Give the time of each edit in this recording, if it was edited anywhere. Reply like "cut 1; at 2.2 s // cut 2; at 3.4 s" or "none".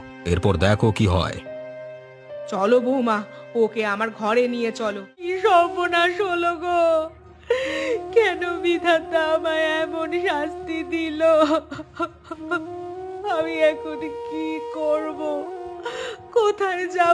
cut 1; at 5.2 s